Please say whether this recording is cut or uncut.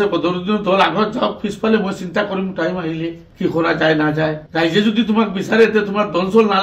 uncut